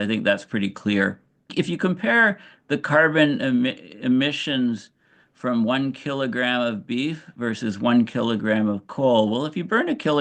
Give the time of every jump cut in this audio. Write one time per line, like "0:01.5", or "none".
none